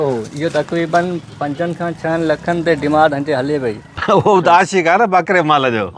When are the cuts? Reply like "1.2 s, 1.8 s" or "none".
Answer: 3.9 s